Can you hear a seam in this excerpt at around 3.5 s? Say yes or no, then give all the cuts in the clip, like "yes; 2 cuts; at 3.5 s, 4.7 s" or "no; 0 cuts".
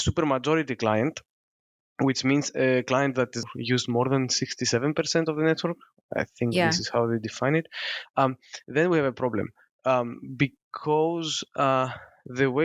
yes; 1 cut; at 3.5 s